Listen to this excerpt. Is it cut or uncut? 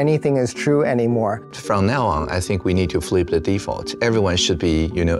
cut